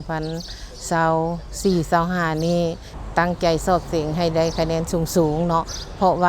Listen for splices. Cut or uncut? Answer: cut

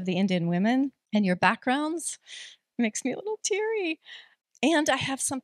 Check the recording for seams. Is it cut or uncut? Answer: cut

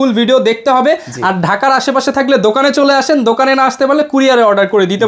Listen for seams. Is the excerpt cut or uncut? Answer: uncut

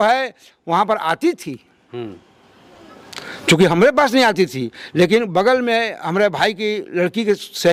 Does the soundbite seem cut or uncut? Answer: uncut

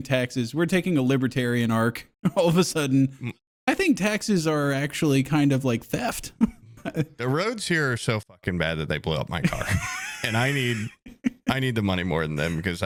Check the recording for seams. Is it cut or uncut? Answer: uncut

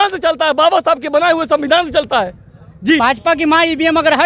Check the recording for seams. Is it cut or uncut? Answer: cut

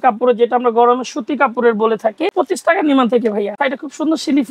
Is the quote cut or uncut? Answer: cut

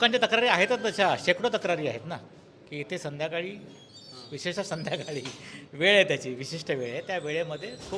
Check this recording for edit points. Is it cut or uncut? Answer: uncut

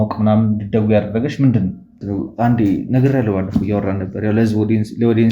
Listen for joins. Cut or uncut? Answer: cut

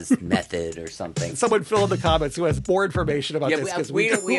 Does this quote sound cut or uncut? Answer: cut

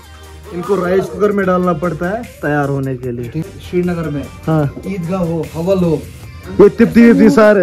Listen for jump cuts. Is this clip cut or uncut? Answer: cut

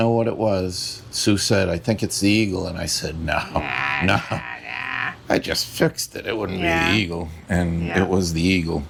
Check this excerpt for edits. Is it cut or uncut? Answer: uncut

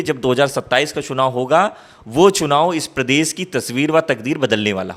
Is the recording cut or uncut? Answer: uncut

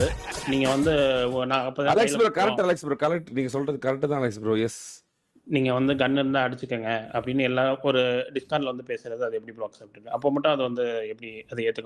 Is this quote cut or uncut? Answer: uncut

